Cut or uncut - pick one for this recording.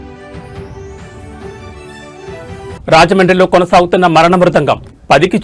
cut